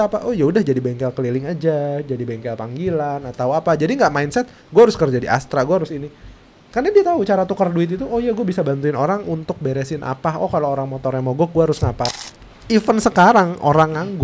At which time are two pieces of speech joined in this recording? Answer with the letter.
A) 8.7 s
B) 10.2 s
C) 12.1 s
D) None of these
C